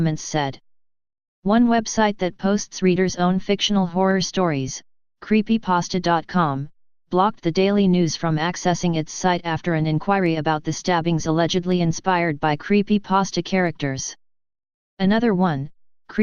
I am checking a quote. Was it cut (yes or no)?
no